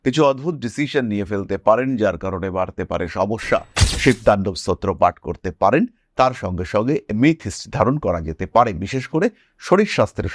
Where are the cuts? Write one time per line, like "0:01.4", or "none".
0:03.8